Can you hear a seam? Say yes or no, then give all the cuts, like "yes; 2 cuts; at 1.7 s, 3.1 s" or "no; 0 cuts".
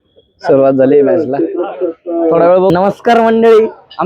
yes; 1 cut; at 2.7 s